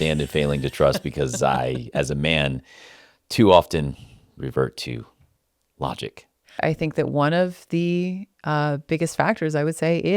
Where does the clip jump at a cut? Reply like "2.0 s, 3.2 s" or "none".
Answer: 6.6 s

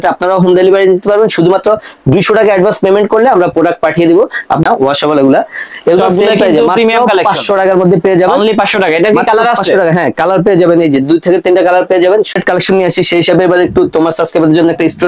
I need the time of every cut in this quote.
4.6 s, 12.3 s

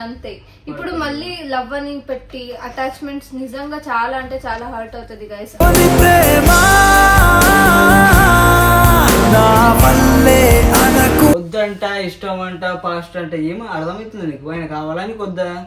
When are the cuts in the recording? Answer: 11.3 s

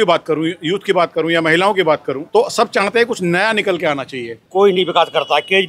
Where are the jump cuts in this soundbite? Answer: 4.3 s

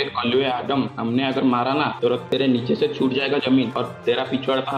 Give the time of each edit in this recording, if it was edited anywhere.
0.9 s, 2.1 s, 3.7 s

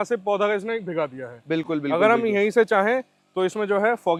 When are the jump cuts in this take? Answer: none

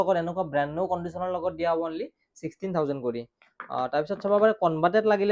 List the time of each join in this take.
none

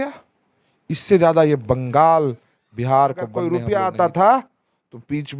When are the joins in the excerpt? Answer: 3.6 s

